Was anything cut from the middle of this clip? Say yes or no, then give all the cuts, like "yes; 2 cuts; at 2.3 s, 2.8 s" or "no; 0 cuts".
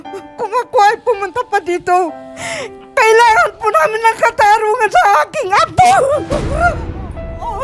no; 0 cuts